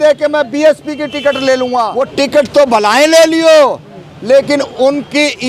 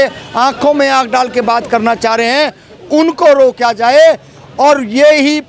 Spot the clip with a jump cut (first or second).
first